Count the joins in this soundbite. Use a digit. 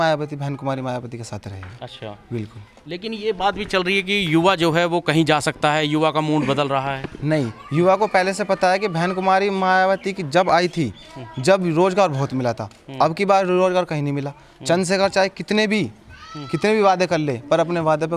0